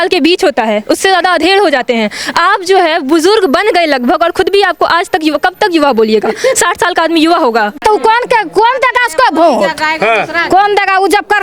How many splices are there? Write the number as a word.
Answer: one